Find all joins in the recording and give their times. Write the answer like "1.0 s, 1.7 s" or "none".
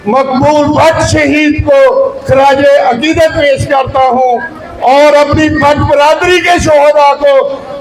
none